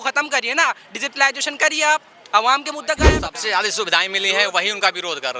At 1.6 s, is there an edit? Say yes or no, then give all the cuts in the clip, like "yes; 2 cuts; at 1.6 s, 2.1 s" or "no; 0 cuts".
no; 1 cut; at 3.1 s